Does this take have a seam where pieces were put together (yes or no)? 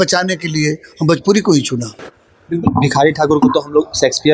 no